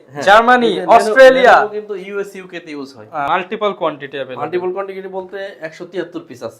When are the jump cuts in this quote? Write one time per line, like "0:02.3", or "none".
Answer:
0:03.3